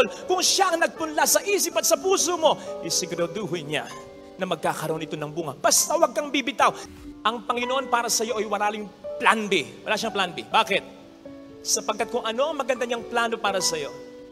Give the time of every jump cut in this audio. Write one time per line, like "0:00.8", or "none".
0:06.9